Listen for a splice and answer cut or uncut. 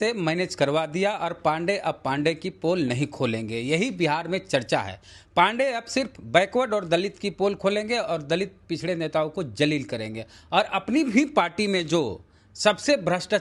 uncut